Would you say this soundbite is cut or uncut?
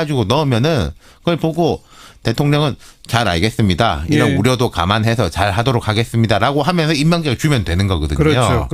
cut